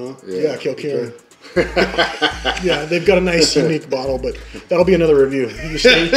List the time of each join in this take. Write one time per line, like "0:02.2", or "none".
none